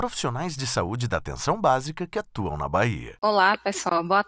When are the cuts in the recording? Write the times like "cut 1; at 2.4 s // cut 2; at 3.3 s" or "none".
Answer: cut 1; at 3.1 s